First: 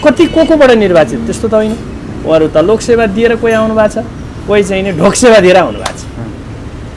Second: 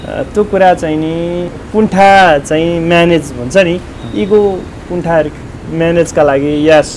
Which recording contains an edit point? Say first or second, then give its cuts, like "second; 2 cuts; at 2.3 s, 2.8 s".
second; 1 cut; at 1.6 s